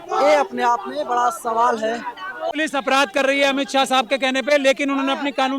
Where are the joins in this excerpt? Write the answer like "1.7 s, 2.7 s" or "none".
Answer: 2.6 s